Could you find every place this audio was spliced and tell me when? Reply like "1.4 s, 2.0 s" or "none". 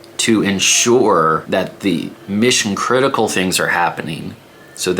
1.4 s